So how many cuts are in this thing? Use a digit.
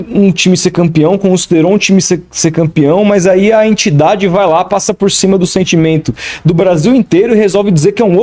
0